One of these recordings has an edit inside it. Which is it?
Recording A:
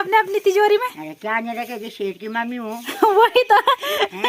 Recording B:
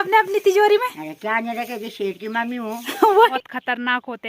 B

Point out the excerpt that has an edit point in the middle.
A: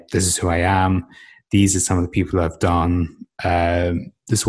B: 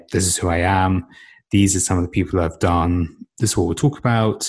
B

